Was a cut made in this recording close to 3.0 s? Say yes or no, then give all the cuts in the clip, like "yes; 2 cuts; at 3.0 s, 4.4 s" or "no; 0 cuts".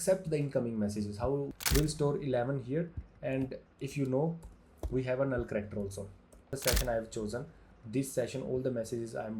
no; 2 cuts; at 1.5 s, 6.5 s